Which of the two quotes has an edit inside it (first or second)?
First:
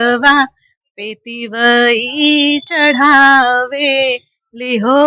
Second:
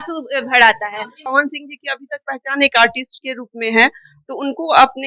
second